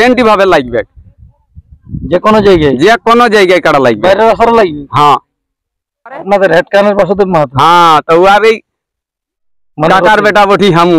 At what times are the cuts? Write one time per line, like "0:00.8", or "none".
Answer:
0:06.2